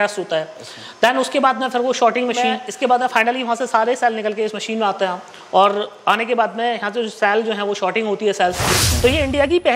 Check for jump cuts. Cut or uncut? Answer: cut